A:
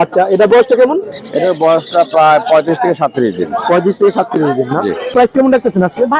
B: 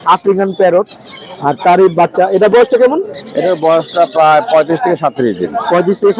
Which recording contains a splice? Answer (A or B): A